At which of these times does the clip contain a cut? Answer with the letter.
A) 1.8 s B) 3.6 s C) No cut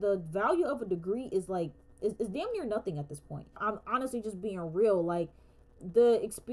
B